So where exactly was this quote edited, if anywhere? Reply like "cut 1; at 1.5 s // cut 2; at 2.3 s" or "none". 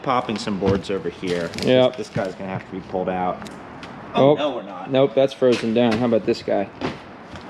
cut 1; at 3.5 s